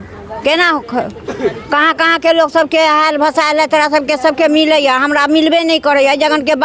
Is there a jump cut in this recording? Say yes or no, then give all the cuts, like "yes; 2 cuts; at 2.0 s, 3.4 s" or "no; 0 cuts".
no; 0 cuts